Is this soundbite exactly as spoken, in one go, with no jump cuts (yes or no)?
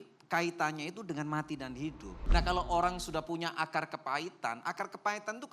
no